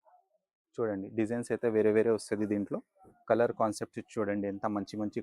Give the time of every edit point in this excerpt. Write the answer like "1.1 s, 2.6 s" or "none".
none

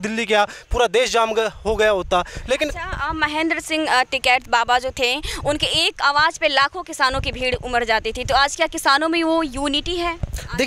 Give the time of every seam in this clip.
none

